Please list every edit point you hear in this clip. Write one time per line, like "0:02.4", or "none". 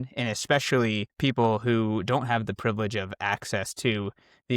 0:01.1